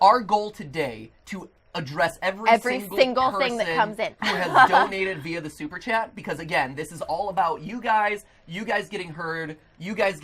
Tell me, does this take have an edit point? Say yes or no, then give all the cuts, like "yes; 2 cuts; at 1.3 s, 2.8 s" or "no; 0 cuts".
no; 0 cuts